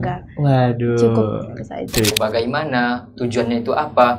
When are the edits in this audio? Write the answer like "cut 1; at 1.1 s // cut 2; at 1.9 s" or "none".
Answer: cut 1; at 2.1 s

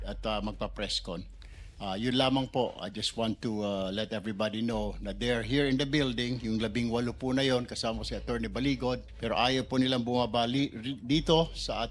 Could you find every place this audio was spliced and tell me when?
cut 1; at 9.1 s

